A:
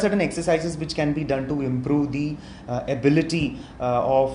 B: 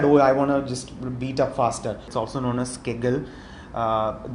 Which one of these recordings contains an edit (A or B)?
B